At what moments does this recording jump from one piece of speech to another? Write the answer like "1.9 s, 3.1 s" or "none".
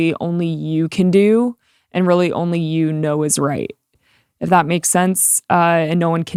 none